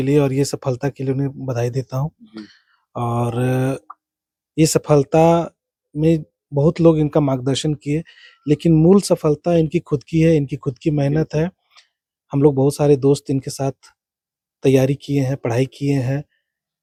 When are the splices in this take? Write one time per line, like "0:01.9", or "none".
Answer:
none